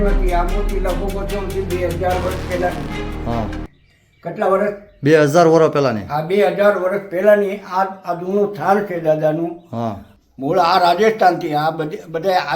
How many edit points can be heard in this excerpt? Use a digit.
1